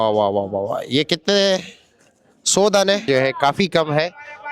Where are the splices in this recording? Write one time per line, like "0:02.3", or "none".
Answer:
0:03.1